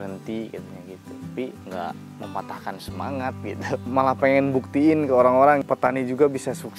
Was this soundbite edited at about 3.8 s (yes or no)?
yes